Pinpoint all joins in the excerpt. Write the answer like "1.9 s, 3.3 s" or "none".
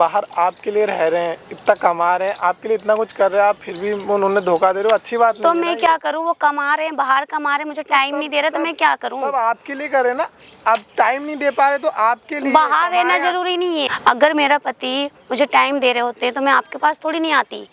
none